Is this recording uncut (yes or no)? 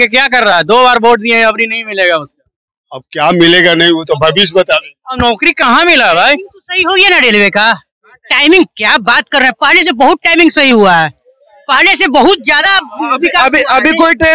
yes